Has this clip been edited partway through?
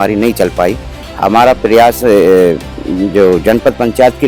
yes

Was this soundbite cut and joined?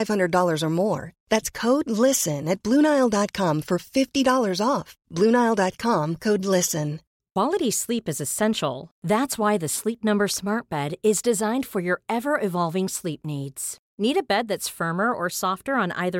yes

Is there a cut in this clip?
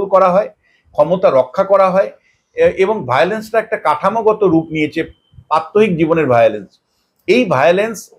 no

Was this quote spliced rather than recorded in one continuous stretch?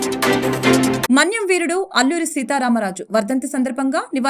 yes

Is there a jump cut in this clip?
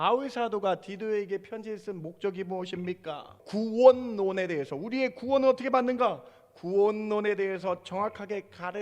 yes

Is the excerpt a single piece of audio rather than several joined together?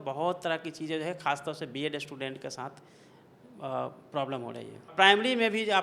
no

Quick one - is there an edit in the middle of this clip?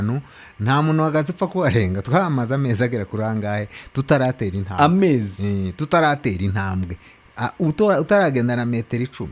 no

